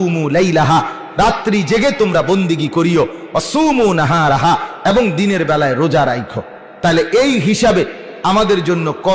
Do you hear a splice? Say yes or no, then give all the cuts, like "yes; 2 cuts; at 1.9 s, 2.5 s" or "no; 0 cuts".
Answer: no; 0 cuts